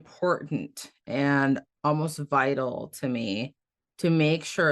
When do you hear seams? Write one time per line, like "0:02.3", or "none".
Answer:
0:01.7